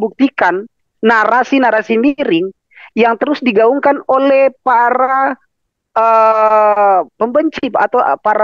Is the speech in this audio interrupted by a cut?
no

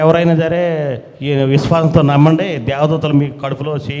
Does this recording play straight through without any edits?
yes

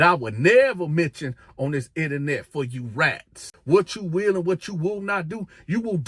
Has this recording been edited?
yes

